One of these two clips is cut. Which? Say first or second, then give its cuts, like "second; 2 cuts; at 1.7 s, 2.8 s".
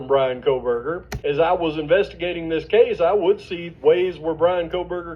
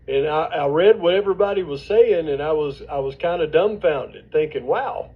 first; 1 cut; at 1.1 s